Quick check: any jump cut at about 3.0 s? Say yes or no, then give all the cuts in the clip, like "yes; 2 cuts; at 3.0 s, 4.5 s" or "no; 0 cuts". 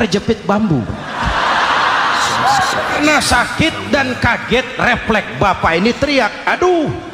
yes; 1 cut; at 3.0 s